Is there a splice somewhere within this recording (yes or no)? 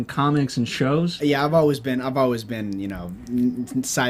no